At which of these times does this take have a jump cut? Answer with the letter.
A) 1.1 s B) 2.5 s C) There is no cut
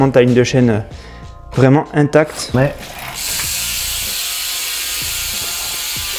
B